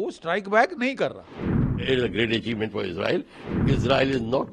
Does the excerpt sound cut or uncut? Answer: cut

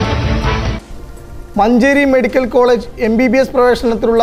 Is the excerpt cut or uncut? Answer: uncut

